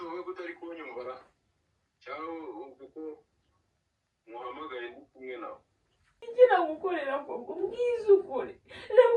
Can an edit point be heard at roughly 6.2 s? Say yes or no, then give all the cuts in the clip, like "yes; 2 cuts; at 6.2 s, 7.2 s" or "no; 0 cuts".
yes; 1 cut; at 6.2 s